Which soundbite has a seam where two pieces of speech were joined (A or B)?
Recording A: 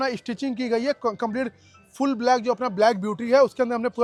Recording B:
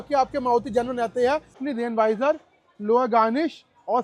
B